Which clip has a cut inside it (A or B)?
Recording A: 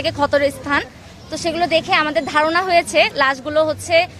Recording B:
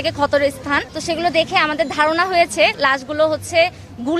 B